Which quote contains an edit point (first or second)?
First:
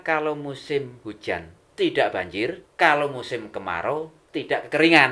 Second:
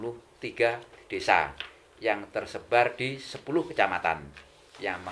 first